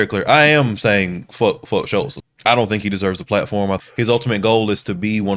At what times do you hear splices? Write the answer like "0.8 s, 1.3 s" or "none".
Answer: 2.1 s, 3.8 s